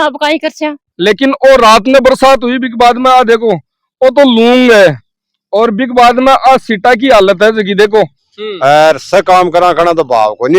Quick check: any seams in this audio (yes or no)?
yes